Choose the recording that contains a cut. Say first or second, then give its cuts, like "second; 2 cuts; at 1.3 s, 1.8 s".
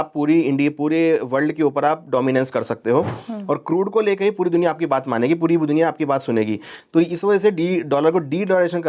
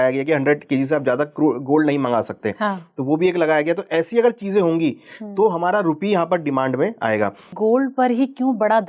second; 1 cut; at 7.5 s